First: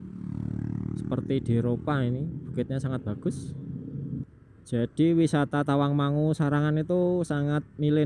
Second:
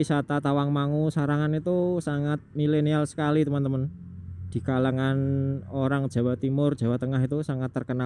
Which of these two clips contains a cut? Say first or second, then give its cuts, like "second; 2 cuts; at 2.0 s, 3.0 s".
first; 1 cut; at 4.2 s